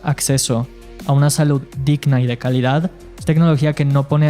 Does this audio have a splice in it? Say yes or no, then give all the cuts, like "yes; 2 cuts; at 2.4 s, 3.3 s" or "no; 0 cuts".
yes; 1 cut; at 3.0 s